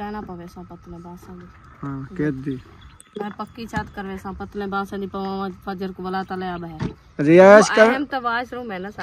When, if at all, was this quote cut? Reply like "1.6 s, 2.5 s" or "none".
7.0 s